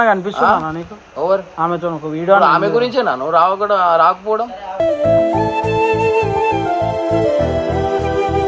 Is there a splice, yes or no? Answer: no